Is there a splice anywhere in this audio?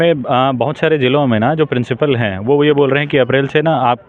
no; 0 cuts

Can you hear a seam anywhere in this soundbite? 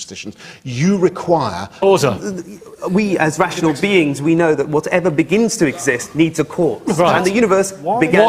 no; 0 cuts

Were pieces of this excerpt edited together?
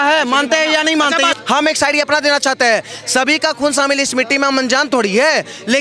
yes; 1 cut; at 1.3 s

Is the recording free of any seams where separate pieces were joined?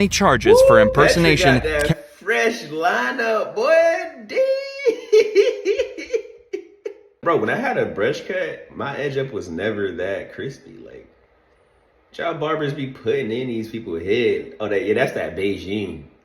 no; 1 cut; at 7.2 s

